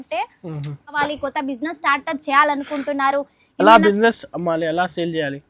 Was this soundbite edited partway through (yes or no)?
yes